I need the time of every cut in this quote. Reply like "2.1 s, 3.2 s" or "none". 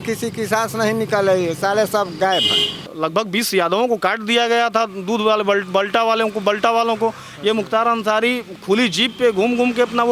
2.8 s